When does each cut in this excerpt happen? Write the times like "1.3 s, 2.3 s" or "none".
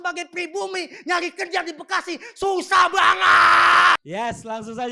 4.0 s